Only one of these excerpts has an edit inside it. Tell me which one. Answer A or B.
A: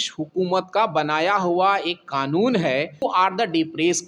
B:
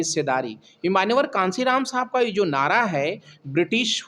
A